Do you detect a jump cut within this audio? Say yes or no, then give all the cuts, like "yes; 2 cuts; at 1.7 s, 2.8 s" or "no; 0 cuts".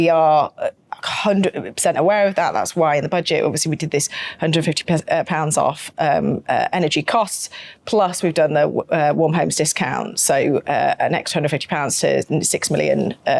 no; 0 cuts